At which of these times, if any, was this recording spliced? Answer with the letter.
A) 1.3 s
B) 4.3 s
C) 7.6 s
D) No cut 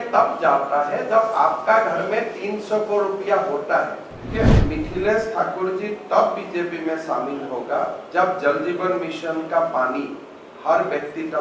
B